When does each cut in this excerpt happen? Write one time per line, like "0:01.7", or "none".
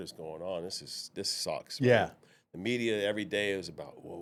none

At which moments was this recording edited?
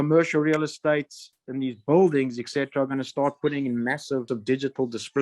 0:04.2

